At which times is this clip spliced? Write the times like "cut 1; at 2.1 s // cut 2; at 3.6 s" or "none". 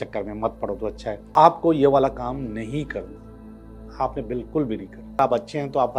cut 1; at 1.3 s // cut 2; at 5.2 s